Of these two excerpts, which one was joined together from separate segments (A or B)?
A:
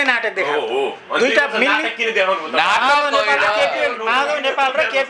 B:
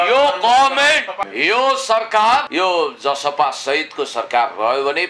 B